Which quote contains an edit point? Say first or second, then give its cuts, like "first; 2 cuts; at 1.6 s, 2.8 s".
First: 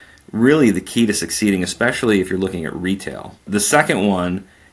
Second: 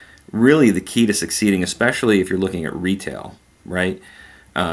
first; 1 cut; at 3.5 s